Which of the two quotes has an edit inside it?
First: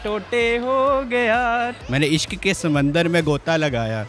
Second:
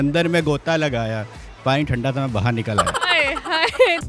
first; 1 cut; at 1.7 s

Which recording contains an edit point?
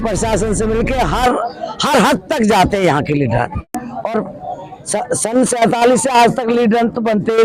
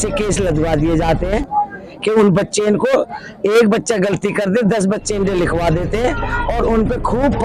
first; 1 cut; at 3.9 s

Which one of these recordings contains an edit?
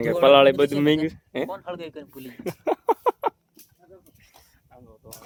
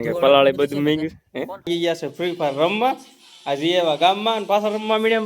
second; 1 cut; at 1.7 s

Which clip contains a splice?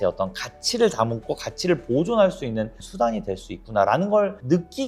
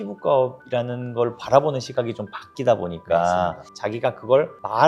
second; 1 cut; at 3.7 s

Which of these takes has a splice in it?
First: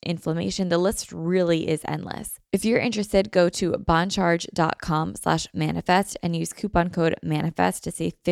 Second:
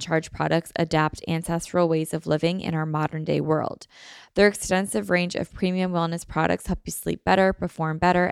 first; 1 cut; at 2.3 s

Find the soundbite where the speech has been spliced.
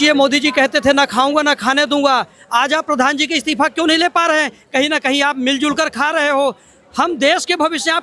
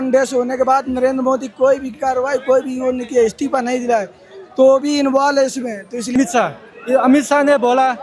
second; 1 cut; at 6.2 s

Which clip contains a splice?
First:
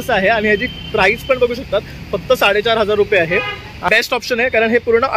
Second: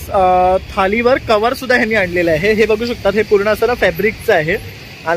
first; 1 cut; at 3.9 s

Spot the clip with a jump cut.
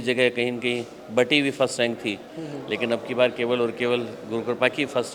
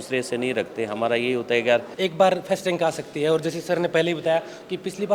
second; 1 cut; at 1.9 s

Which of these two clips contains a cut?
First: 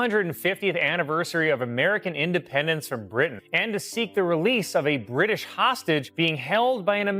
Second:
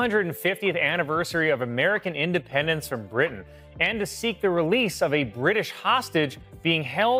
first; 2 cuts; at 3.4 s, 6.1 s

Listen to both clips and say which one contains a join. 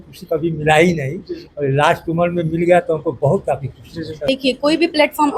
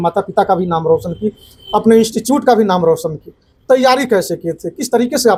first; 1 cut; at 4.2 s

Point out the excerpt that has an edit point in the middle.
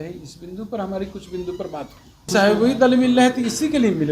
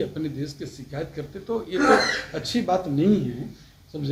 first; 1 cut; at 2.3 s

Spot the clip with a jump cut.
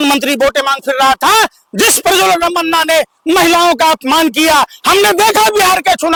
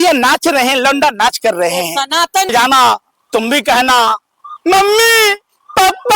second; 1 cut; at 2.5 s

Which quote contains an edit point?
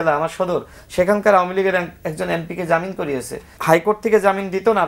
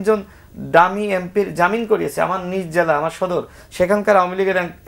first; 1 cut; at 3.5 s

